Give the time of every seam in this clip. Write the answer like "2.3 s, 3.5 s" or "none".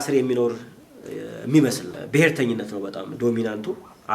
none